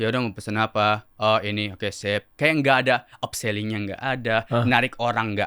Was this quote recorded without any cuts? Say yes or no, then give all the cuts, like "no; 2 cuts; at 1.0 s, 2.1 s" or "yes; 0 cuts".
no; 1 cut; at 1.1 s